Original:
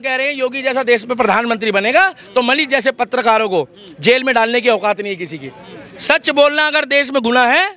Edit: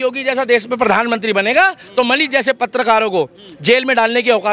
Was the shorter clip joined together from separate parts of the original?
no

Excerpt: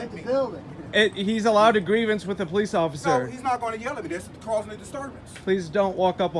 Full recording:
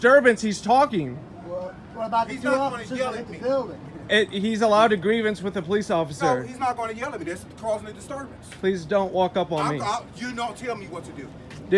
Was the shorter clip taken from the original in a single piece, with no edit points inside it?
yes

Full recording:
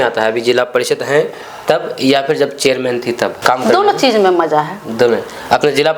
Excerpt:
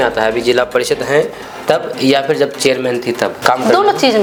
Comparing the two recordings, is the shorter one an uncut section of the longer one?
yes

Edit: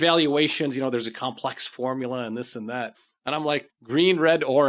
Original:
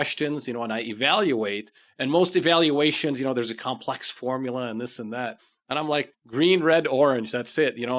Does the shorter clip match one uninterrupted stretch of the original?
yes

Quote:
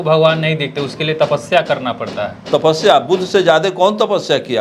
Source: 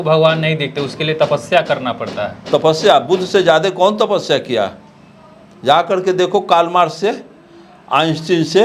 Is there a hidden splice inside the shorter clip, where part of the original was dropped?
no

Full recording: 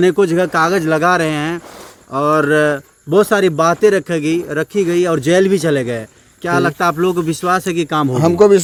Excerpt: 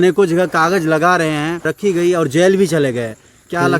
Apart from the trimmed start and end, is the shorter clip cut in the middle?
yes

